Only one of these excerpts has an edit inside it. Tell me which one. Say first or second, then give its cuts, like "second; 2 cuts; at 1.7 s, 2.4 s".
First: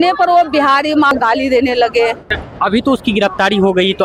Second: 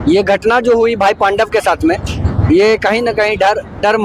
first; 2 cuts; at 1.1 s, 2.2 s